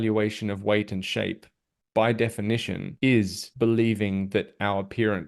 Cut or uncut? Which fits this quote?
cut